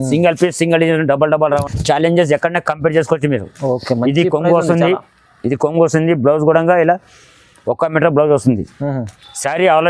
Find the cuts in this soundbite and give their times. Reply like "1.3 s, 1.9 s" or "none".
1.6 s